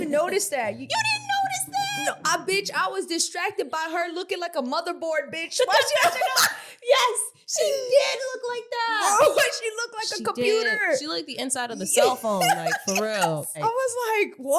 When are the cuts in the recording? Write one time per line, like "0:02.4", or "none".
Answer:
0:13.6